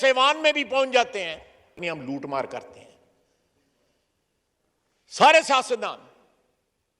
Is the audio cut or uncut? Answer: cut